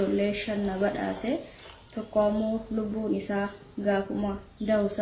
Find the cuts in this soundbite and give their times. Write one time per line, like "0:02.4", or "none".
none